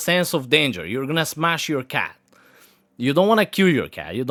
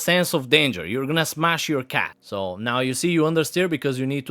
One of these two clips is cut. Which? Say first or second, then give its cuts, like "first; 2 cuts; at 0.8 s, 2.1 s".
second; 1 cut; at 2.2 s